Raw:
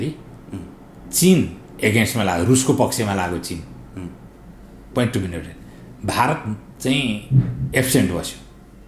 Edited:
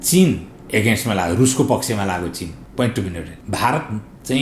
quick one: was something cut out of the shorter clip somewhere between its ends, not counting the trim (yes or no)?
yes